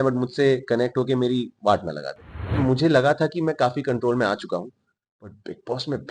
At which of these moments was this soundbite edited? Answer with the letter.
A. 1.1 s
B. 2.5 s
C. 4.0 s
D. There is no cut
B